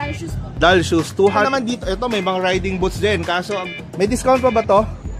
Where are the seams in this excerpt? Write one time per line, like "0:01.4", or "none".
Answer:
0:01.2
0:03.6